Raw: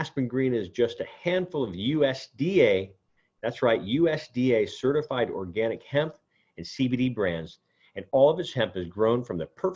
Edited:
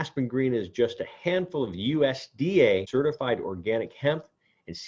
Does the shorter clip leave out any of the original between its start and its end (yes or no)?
yes